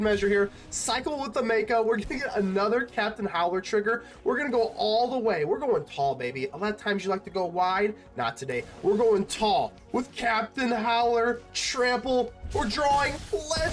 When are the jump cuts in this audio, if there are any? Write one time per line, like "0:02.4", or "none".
none

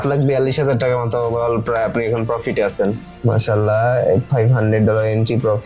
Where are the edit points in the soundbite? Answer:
0:03.1

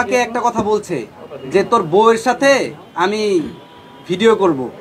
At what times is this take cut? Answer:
none

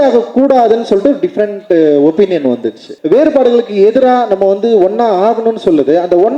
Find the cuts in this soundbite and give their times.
0:02.9

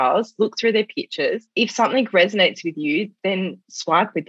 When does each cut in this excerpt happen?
0:01.5

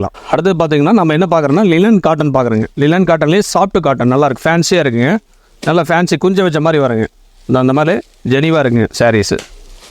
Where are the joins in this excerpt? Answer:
none

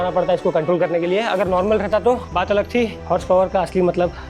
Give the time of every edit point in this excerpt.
0:03.0

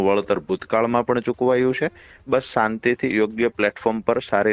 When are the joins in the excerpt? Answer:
none

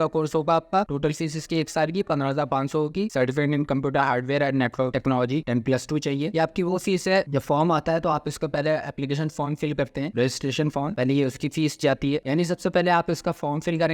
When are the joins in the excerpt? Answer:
0:03.1
0:06.3
0:12.2

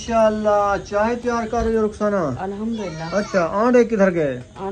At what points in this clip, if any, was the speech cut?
0:03.3

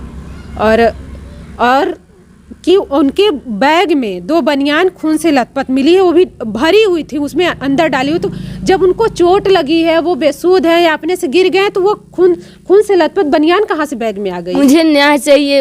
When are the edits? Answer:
0:14.5

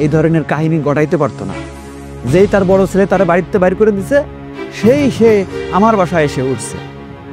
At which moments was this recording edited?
none

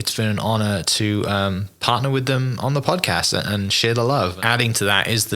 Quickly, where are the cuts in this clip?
0:04.4

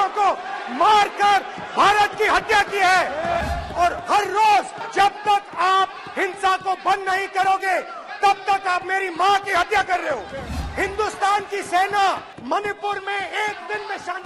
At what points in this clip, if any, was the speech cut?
0:03.4
0:04.8
0:10.4
0:12.3

